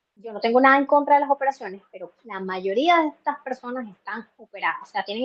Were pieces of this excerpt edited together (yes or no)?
no